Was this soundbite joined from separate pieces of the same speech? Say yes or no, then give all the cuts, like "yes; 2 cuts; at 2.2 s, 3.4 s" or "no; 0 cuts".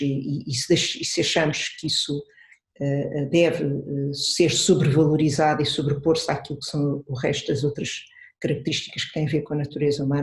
no; 0 cuts